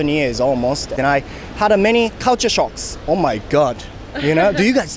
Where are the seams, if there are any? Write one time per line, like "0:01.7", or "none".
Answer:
0:00.9